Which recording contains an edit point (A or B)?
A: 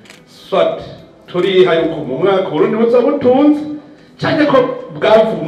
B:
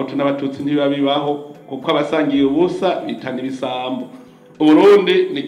B